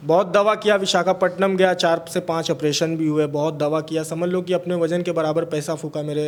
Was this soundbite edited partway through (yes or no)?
no